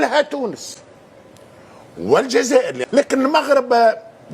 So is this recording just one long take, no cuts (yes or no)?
no